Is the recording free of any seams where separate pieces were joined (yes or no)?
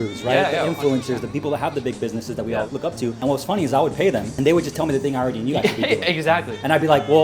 no